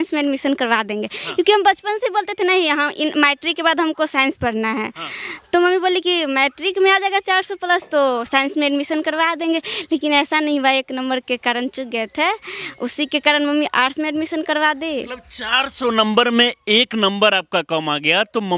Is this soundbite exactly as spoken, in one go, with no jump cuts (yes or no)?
yes